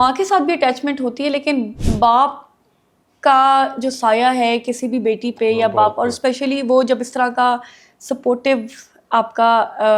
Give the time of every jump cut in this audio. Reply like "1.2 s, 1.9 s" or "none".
none